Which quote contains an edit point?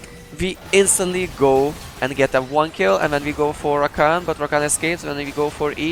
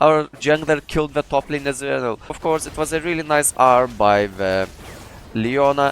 second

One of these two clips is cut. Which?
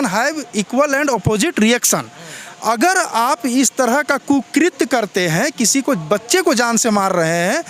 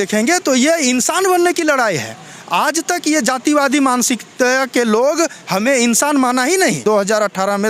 second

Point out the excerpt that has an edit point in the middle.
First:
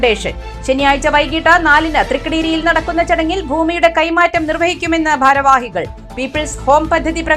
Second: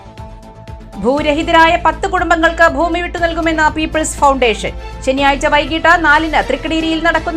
second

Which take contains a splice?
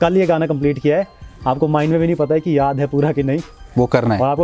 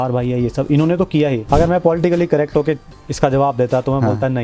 second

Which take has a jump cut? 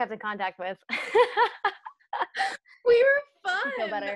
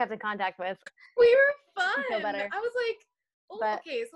second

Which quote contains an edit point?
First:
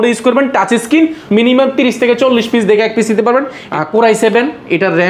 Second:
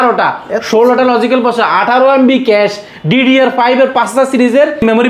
first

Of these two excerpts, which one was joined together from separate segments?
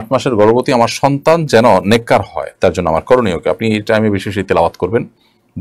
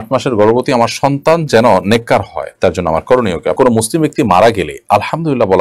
second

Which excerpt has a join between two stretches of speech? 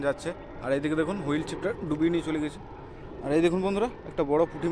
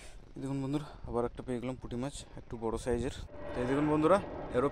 second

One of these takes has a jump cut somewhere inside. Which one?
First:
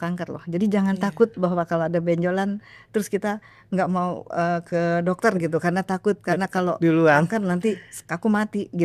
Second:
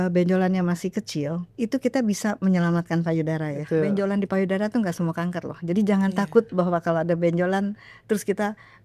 second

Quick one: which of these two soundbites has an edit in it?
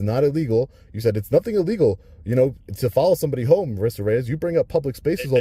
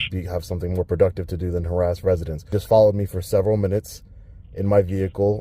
second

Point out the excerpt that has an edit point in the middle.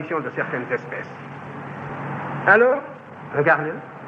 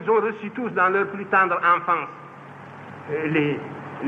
first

